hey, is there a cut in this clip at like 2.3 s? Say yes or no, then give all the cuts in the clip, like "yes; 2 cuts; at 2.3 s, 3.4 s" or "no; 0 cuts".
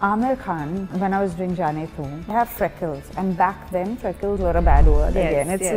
yes; 2 cuts; at 0.9 s, 2.3 s